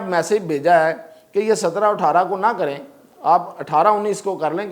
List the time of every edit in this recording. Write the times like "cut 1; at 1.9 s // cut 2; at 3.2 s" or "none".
none